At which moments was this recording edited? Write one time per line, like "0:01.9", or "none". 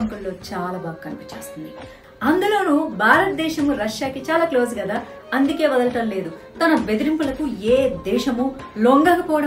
0:02.1